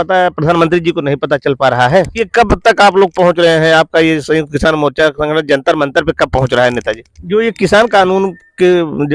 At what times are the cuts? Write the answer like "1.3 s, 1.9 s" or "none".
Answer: 2.1 s, 7.1 s